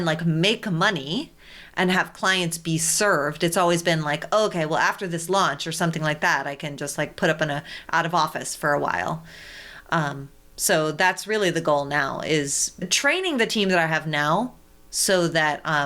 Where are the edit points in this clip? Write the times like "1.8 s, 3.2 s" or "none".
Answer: 12.9 s